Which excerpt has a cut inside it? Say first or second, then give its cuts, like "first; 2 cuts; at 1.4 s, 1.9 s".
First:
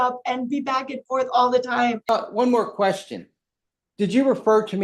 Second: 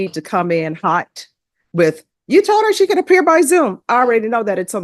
first; 1 cut; at 2.0 s